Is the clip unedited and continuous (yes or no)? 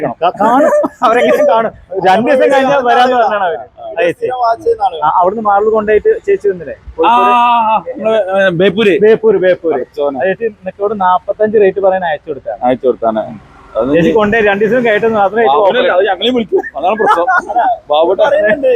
yes